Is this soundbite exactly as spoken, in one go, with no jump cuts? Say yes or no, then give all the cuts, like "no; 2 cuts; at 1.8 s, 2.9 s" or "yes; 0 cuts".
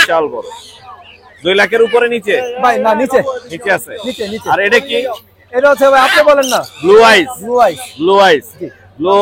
yes; 0 cuts